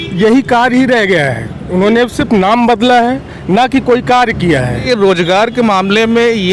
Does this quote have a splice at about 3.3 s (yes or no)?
no